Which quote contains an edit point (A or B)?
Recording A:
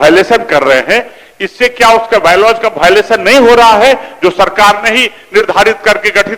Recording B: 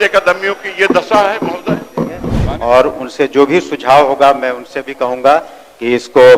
B